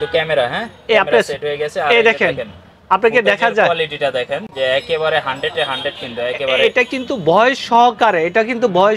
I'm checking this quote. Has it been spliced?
no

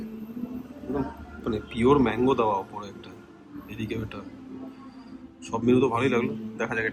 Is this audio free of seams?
yes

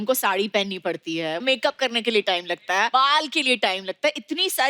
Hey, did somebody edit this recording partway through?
yes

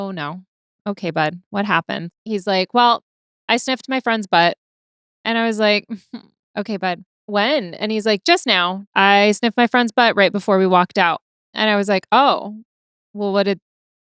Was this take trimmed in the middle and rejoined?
yes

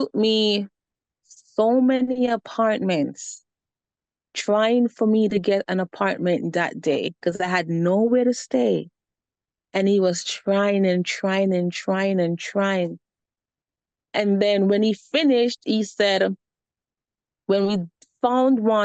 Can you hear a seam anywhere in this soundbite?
no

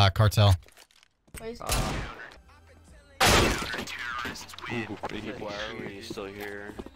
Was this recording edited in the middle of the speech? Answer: no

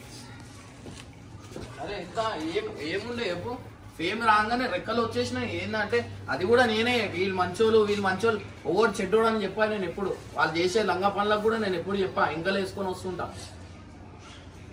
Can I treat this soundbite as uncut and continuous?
yes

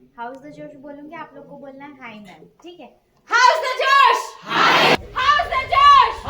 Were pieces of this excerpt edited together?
yes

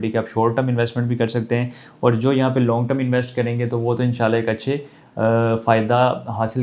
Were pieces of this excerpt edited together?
no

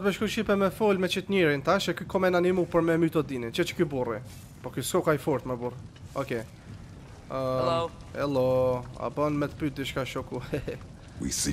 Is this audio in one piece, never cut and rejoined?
yes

